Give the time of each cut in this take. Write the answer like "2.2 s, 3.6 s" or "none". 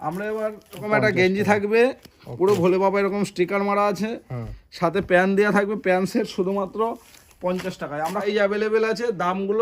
0.8 s, 8.2 s